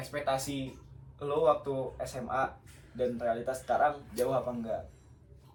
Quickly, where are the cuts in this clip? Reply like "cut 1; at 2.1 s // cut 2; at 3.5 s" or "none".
none